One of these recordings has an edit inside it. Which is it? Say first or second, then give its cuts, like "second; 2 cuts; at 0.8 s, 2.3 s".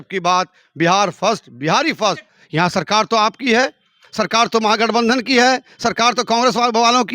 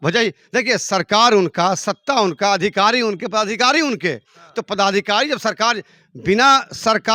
first; 1 cut; at 2.3 s